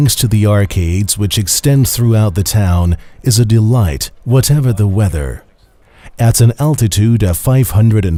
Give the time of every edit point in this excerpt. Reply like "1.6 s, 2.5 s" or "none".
none